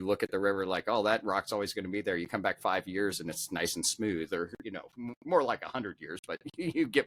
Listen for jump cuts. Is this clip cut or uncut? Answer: uncut